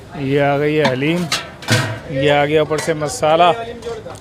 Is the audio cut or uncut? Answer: cut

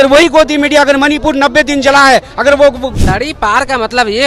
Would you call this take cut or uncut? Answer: cut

